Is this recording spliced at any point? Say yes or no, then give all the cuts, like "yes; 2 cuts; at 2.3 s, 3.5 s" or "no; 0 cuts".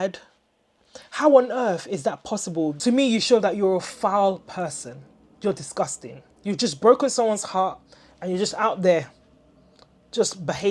yes; 1 cut; at 2.8 s